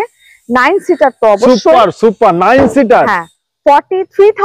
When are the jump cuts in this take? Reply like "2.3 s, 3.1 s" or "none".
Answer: none